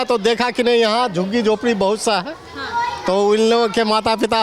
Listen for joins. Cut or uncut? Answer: uncut